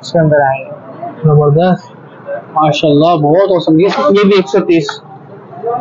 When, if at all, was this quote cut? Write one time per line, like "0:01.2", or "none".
0:03.9

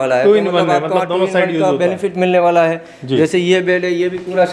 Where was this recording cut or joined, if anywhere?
none

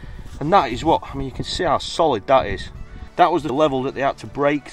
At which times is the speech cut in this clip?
0:03.5

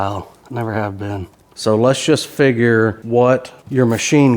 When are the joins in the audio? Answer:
0:01.3

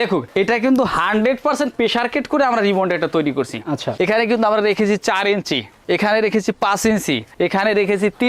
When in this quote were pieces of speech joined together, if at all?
0:03.9

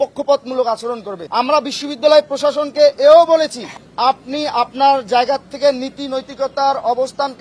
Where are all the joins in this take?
0:01.1

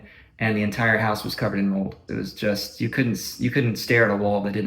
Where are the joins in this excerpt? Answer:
0:02.0

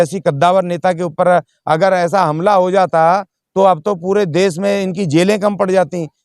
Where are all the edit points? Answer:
none

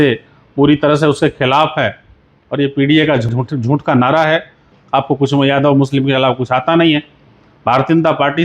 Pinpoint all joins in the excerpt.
0:03.3
0:04.8

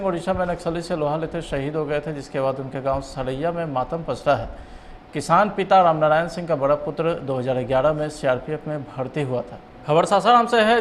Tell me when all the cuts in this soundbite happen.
0:09.8

